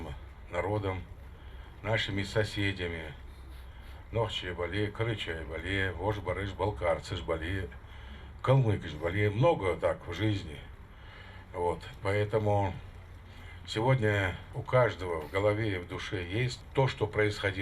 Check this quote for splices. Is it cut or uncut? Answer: cut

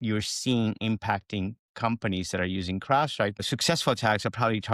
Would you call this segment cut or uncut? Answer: cut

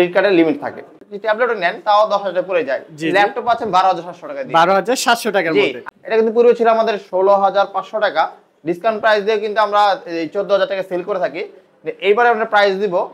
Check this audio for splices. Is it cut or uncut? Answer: cut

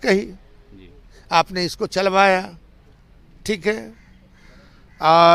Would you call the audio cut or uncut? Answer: uncut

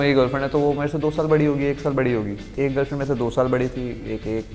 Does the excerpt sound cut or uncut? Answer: cut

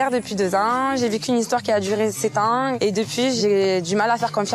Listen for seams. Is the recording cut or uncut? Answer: cut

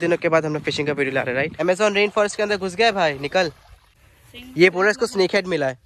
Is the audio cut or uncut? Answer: cut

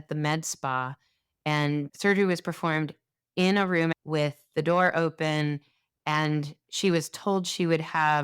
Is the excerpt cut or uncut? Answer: cut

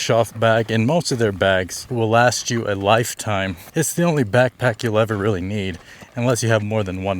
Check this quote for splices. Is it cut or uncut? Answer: cut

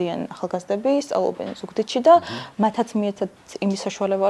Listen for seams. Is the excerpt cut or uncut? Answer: uncut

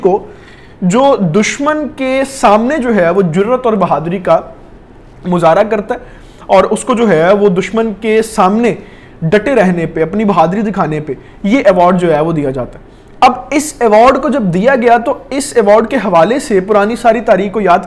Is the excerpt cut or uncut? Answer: uncut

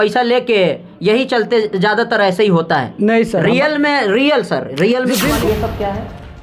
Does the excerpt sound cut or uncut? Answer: cut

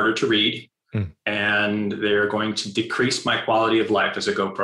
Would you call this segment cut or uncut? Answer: uncut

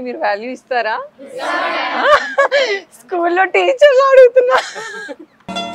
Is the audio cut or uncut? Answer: uncut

